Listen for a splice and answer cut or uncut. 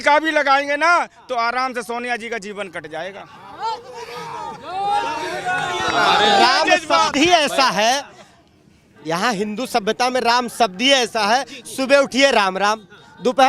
uncut